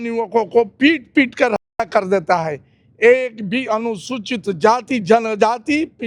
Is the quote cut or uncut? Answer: uncut